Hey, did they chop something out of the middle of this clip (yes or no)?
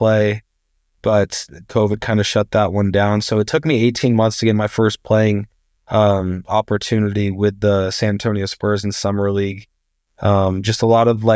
no